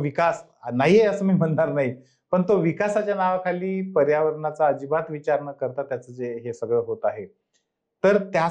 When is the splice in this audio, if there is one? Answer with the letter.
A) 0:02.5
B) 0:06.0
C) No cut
C